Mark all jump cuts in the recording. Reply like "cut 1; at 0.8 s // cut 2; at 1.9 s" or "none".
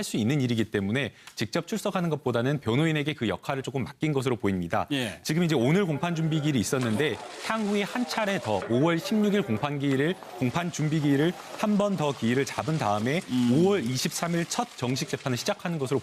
none